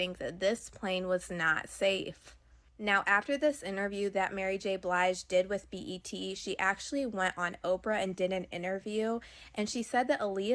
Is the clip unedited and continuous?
yes; 0 cuts

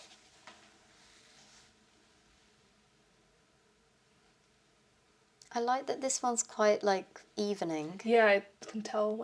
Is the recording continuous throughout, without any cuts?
yes; 0 cuts

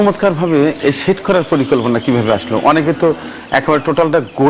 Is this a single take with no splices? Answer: yes; 0 cuts

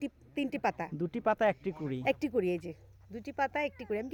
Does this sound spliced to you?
no; 0 cuts

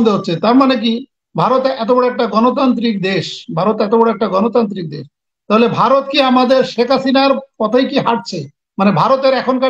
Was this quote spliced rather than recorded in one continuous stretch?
no; 0 cuts

